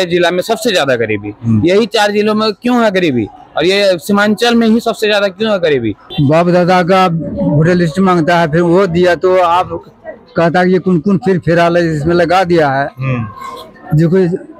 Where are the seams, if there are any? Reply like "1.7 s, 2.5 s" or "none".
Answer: 6.0 s